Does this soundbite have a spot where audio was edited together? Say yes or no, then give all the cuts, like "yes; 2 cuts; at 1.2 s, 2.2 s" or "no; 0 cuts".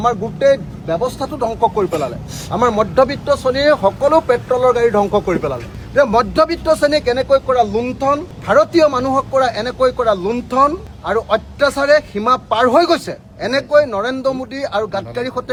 no; 0 cuts